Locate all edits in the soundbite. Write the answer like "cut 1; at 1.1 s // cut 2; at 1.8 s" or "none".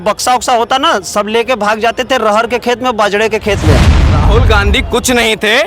cut 1; at 4.0 s